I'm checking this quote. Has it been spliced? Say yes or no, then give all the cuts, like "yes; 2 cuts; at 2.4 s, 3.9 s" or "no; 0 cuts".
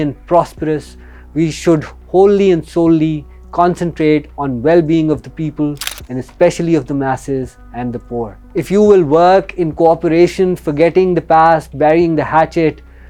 no; 0 cuts